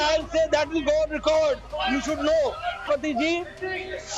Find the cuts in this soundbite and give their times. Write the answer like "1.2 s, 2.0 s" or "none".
2.9 s

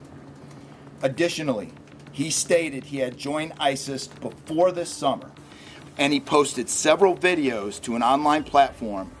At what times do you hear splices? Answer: none

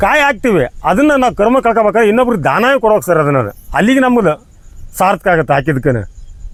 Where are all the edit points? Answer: none

